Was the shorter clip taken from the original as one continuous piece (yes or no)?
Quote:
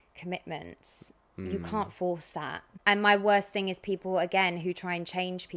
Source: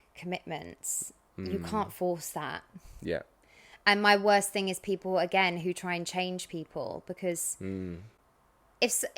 no